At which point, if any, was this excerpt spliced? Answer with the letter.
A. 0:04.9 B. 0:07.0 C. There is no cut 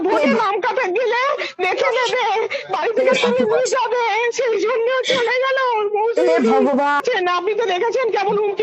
B